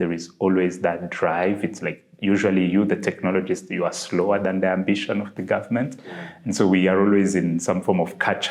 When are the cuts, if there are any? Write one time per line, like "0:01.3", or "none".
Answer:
none